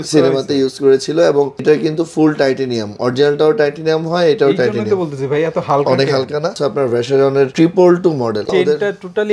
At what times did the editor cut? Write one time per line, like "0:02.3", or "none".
0:06.6